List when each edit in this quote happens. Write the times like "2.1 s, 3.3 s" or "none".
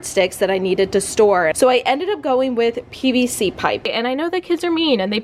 1.5 s, 3.9 s